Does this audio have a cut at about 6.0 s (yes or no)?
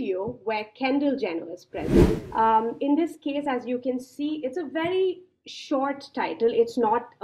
no